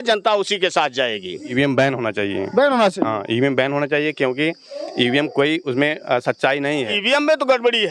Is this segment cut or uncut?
cut